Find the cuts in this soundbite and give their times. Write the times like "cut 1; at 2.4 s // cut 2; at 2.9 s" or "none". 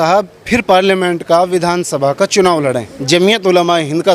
cut 1; at 2.9 s